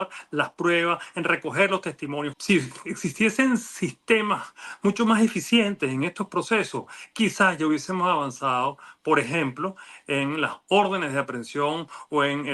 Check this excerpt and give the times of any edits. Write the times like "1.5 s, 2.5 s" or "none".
2.3 s